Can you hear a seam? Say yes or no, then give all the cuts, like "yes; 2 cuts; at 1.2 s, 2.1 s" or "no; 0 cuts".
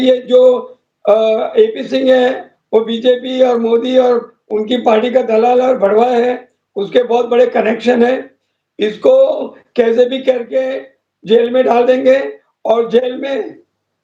no; 0 cuts